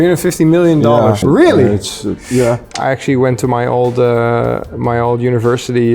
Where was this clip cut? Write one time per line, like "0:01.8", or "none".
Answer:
0:01.2
0:02.7